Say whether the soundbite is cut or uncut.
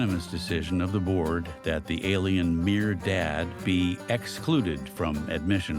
uncut